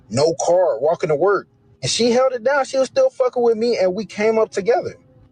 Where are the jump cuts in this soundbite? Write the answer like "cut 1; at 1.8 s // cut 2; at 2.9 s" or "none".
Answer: none